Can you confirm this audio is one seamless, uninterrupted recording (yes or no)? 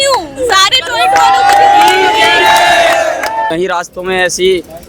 no